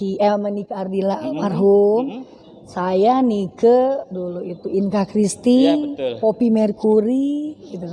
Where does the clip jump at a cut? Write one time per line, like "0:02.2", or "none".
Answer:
none